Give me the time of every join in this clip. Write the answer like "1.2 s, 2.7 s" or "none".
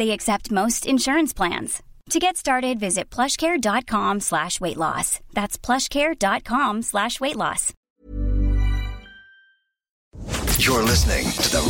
10.2 s